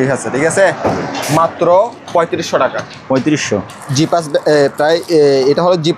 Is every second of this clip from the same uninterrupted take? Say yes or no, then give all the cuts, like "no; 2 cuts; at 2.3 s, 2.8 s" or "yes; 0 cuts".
yes; 0 cuts